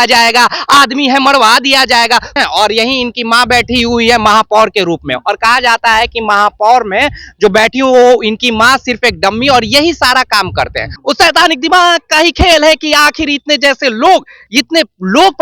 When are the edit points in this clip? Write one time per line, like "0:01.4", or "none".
0:02.4
0:10.9